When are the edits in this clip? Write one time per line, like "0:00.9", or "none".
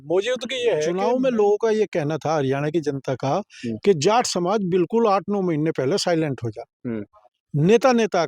0:00.9